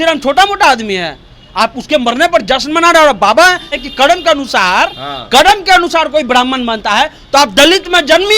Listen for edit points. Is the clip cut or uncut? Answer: cut